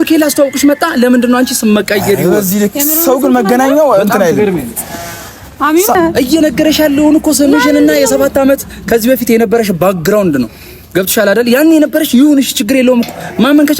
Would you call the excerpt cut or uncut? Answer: cut